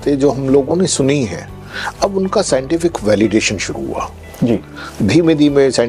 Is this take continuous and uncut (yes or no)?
yes